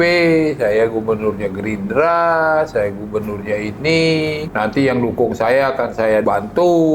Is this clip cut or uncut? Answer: cut